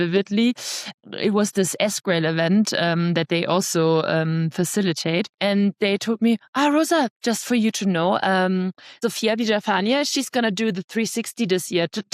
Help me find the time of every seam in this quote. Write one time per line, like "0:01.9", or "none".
0:00.9
0:05.3
0:08.8